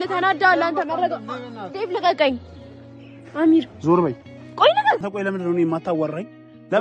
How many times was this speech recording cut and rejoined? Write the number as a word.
one